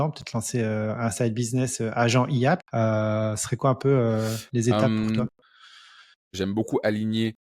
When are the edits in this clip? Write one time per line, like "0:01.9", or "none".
0:02.7
0:06.3